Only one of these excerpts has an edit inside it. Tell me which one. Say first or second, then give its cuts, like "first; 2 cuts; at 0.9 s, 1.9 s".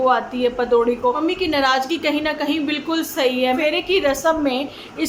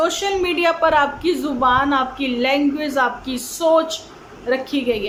first; 2 cuts; at 1.2 s, 3.6 s